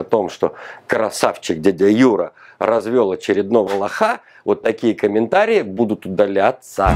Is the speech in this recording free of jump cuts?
yes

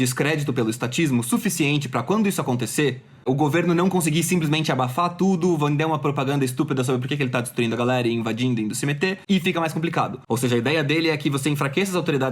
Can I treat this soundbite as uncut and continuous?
no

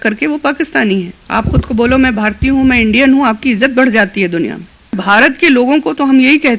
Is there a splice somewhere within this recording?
yes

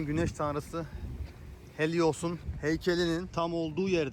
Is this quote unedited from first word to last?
no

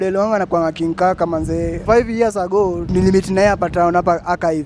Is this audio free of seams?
no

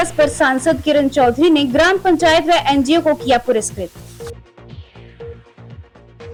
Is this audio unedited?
yes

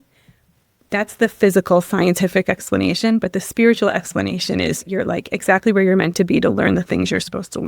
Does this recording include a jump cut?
yes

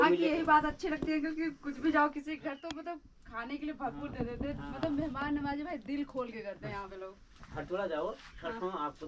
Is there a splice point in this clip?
no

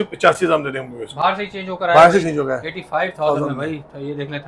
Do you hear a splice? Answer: no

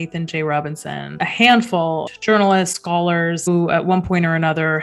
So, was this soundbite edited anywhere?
yes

